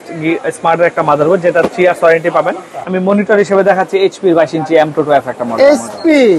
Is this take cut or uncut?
cut